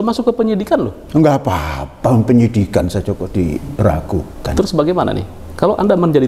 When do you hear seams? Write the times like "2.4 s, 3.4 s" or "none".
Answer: none